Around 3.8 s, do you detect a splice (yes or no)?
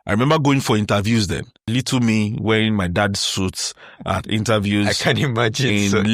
no